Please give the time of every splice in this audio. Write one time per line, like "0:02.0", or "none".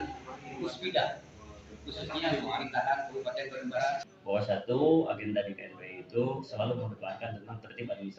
0:04.1